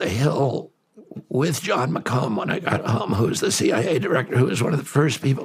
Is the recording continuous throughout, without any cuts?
yes; 0 cuts

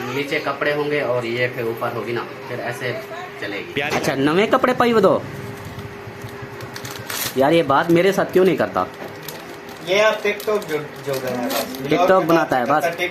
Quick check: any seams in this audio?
yes; 1 cut; at 3.8 s

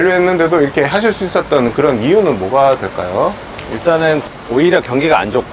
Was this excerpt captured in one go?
no; 1 cut; at 4.3 s

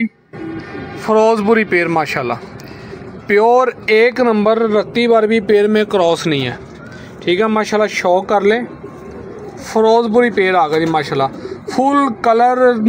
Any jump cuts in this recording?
no; 0 cuts

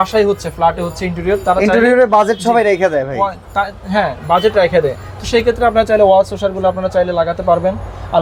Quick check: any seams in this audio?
no; 0 cuts

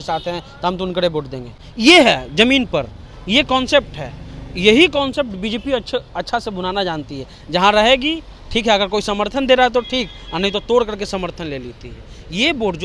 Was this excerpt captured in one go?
yes; 0 cuts

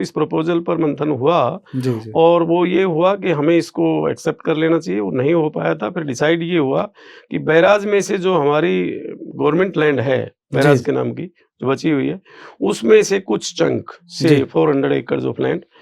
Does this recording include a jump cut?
no; 0 cuts

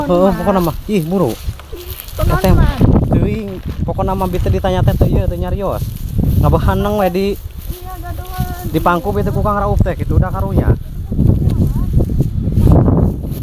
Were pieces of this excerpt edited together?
no; 0 cuts

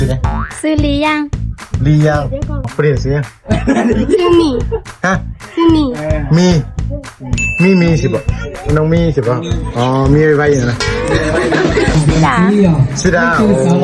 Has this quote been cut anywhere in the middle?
yes; 2 cuts; at 2.7 s, 11.9 s

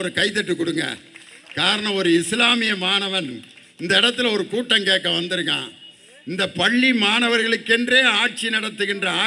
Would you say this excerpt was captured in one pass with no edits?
yes; 0 cuts

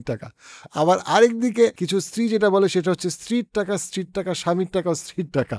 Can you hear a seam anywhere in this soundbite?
yes; 1 cut; at 1.8 s

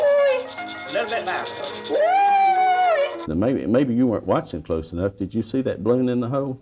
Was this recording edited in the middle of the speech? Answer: yes; 1 cut; at 3.3 s

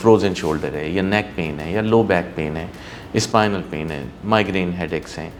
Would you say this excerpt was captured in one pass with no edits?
yes; 0 cuts

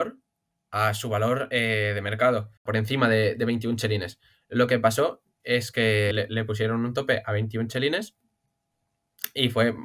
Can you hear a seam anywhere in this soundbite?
yes; 2 cuts; at 2.6 s, 6.1 s

